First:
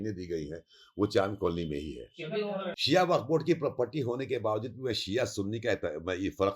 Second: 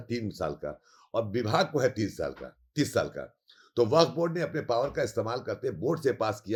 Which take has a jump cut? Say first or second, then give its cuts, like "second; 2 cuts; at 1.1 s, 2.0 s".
first; 1 cut; at 2.7 s